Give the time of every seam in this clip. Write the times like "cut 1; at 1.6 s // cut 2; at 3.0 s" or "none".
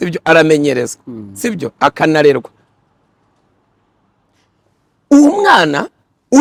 none